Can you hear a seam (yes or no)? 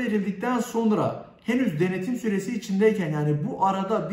no